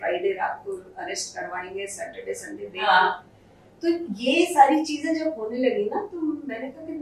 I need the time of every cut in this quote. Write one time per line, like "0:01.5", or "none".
none